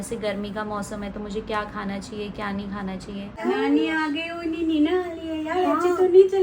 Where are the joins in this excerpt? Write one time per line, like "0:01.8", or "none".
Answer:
0:03.4